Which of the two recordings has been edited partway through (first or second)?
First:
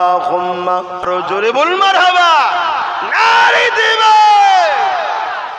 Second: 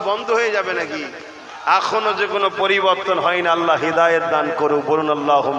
first